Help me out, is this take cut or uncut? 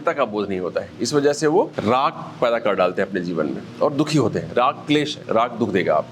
cut